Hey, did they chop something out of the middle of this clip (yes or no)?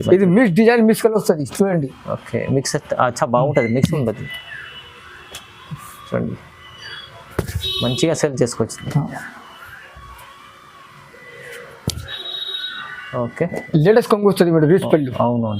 yes